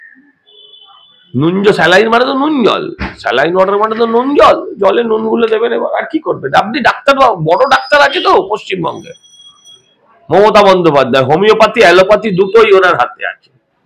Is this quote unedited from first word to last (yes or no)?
yes